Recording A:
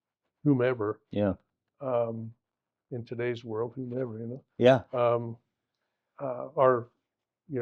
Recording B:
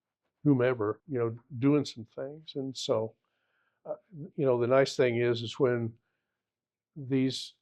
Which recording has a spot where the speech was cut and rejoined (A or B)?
B